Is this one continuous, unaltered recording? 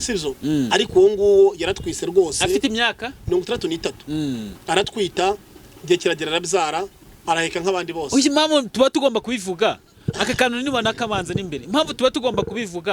yes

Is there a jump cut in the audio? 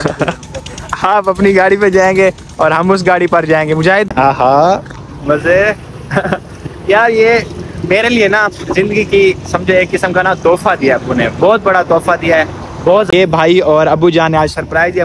yes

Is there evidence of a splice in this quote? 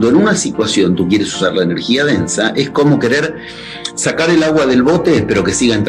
no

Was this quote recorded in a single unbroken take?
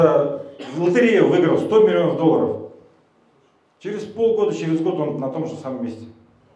yes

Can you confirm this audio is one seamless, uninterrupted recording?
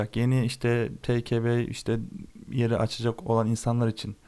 yes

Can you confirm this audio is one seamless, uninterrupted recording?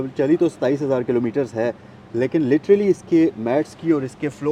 yes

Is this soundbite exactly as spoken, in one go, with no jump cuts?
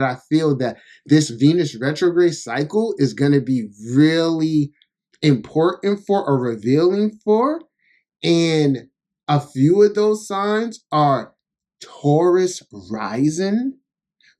yes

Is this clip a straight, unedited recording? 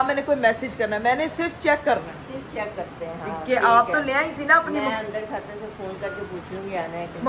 yes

